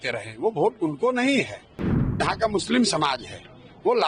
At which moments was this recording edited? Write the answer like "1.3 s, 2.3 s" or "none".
none